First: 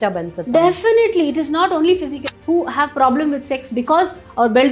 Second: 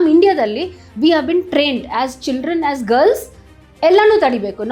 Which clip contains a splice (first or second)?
first